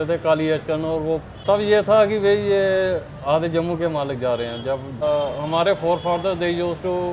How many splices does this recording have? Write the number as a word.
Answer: two